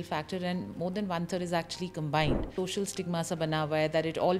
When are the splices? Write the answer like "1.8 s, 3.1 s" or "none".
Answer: 2.5 s